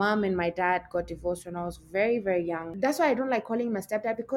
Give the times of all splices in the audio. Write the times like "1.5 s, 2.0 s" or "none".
2.7 s